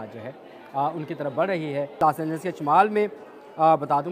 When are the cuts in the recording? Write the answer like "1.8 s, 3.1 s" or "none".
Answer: 2.0 s